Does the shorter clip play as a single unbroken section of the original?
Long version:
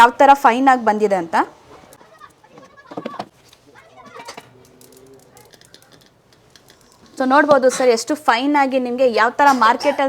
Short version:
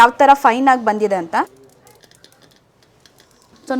no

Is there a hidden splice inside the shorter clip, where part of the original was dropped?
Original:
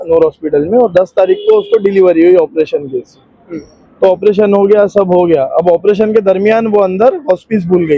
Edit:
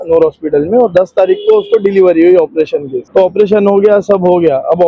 yes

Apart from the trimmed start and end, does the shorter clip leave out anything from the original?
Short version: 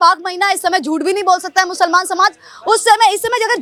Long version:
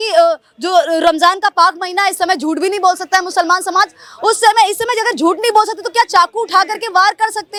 no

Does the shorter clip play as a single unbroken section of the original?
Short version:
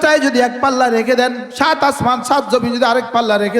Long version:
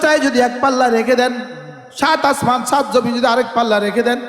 no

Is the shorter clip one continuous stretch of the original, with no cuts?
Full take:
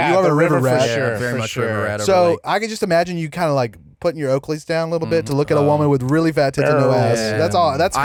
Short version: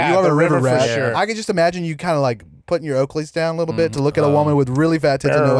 no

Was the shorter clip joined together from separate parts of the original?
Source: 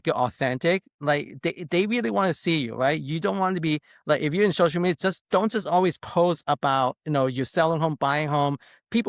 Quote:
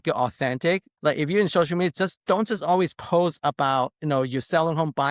yes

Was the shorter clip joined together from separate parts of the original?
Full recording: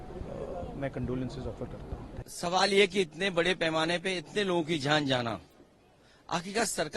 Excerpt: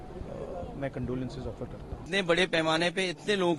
yes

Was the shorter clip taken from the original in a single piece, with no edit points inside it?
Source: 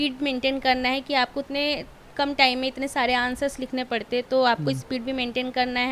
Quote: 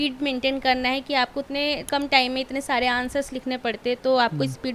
no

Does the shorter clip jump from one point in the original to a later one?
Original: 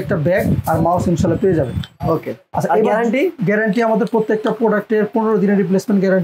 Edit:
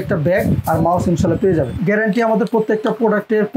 yes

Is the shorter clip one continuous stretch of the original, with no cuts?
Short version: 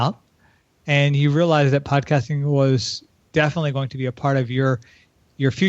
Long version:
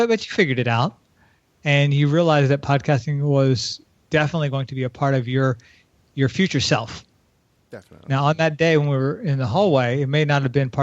yes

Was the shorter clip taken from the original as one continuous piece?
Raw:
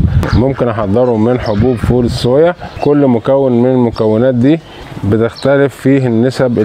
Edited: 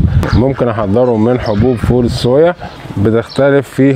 no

